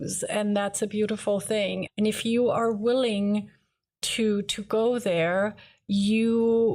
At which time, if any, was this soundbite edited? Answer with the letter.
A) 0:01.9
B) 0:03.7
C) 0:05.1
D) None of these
A